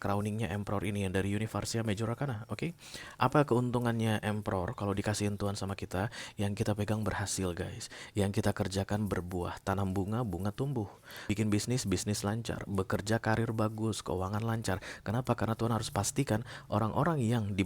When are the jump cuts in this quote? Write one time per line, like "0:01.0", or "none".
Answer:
0:11.3